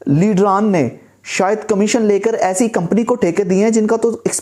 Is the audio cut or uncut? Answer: uncut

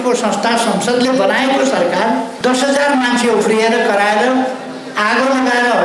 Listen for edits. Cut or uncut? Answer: cut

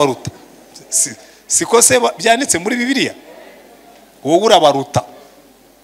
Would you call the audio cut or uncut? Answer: uncut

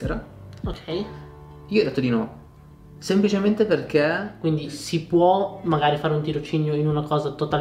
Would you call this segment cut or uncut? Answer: cut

